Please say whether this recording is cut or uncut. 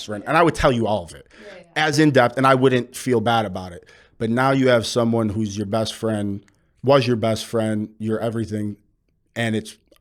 uncut